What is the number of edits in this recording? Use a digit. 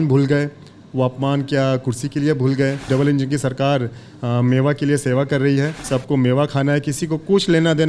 2